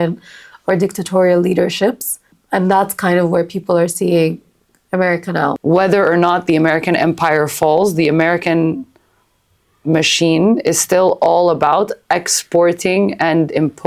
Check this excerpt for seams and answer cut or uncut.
cut